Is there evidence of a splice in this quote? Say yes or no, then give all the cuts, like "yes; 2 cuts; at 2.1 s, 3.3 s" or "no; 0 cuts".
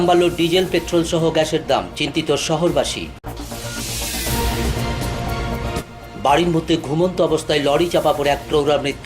yes; 2 cuts; at 3.2 s, 5.8 s